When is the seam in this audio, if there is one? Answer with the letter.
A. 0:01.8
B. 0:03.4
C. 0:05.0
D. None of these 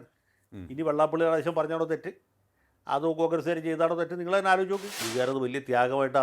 C